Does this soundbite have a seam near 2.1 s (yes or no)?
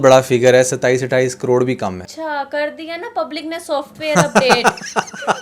yes